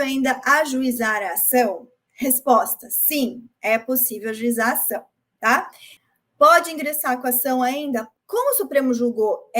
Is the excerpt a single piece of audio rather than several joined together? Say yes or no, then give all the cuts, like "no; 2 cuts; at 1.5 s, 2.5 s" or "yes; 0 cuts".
no; 1 cut; at 8.1 s